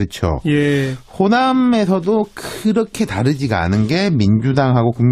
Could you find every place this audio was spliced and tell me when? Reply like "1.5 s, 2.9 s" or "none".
2.0 s